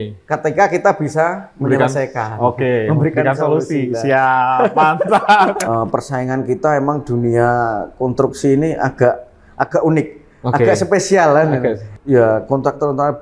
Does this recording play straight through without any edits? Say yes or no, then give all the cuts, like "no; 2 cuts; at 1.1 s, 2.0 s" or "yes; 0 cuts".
no; 2 cuts; at 5.6 s, 11.9 s